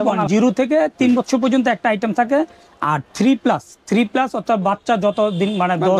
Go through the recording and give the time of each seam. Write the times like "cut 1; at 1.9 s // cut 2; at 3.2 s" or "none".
none